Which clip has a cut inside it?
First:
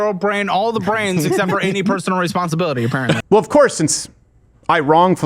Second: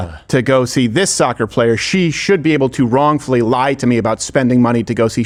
first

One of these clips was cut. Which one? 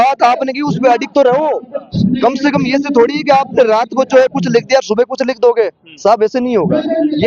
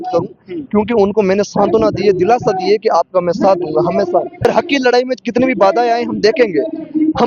second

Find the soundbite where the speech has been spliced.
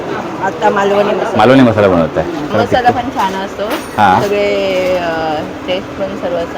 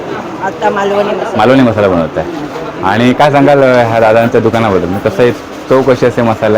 first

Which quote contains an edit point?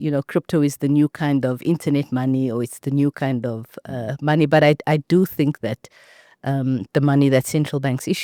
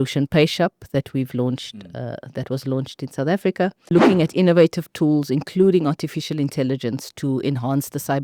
second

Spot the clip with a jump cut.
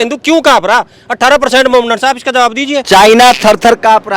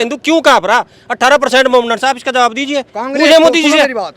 first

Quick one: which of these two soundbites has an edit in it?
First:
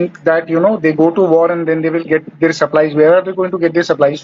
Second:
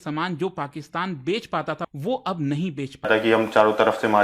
second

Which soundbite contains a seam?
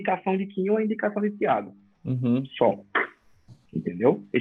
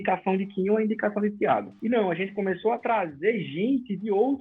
second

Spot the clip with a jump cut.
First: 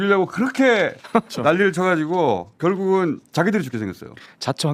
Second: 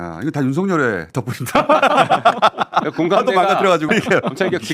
second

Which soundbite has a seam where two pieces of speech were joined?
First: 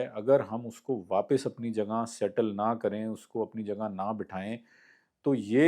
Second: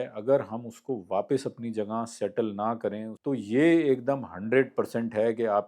second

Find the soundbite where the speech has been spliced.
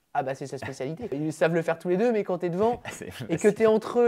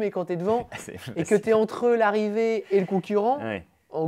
first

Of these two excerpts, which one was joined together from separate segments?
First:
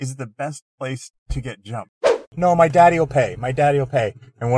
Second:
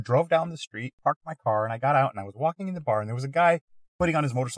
first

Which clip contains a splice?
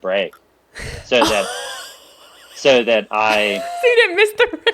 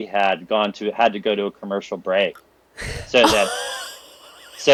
first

